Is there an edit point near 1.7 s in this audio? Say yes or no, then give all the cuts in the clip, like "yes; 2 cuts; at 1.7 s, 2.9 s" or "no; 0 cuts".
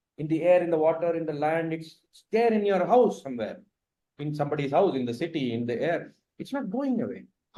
no; 0 cuts